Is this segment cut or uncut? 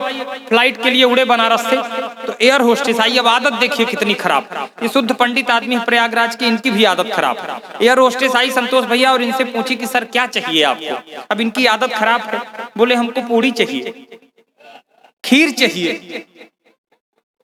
uncut